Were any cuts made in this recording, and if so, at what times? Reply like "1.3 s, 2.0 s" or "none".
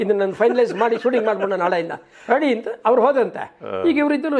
none